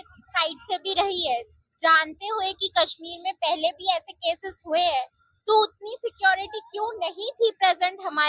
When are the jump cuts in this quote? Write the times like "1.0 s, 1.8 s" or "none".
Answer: none